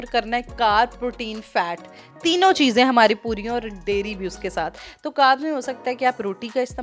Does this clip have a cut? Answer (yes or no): no